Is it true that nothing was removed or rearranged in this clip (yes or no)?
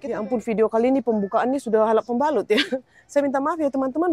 yes